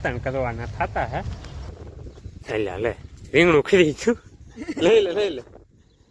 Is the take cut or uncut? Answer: cut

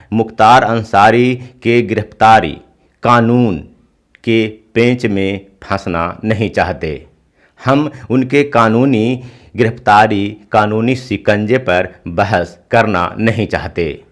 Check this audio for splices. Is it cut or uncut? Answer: uncut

